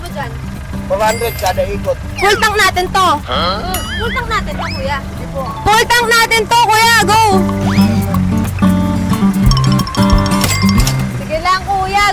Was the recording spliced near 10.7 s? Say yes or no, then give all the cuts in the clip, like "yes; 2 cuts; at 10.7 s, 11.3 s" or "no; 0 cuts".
yes; 1 cut; at 10.7 s